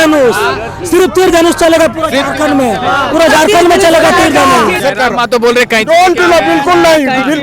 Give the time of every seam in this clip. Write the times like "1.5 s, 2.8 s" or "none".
4.8 s